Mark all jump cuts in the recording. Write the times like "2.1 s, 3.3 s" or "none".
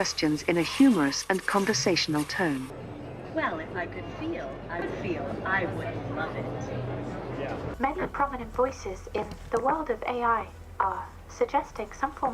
7.7 s